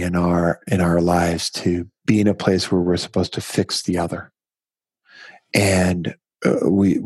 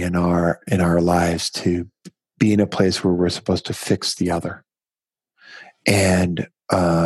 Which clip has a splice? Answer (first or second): first